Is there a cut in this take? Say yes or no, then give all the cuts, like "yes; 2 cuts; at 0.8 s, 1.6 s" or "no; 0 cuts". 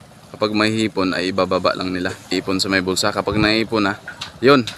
yes; 1 cut; at 2.3 s